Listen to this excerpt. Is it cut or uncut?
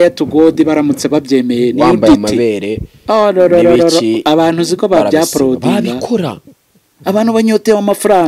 uncut